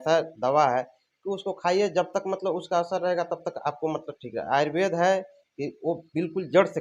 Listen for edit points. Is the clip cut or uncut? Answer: uncut